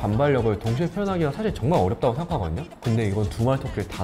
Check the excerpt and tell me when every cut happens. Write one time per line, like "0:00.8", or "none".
0:02.7